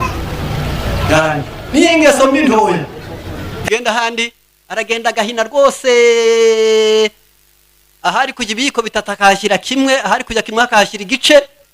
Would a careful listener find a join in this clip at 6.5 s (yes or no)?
no